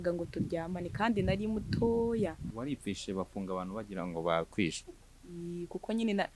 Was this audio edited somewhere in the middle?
yes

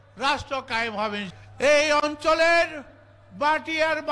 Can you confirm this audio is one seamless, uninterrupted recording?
no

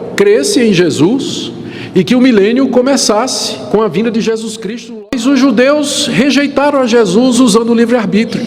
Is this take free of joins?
no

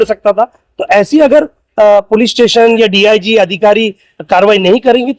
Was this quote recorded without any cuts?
yes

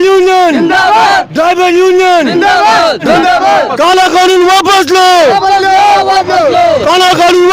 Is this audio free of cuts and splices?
no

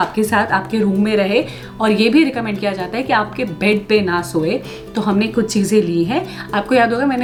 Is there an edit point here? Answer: no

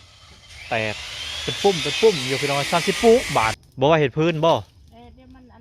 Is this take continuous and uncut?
no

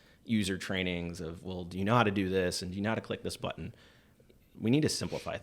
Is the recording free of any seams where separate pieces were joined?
no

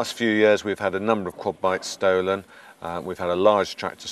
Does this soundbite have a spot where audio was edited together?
no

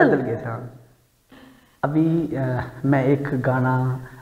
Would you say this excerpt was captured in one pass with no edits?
no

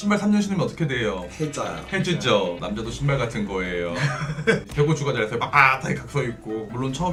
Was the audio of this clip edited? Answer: no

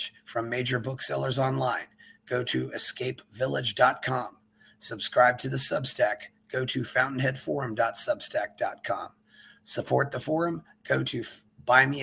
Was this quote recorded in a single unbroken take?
yes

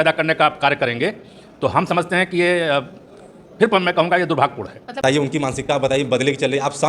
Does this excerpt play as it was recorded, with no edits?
no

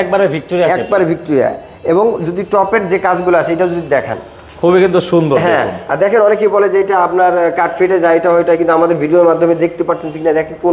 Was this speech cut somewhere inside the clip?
no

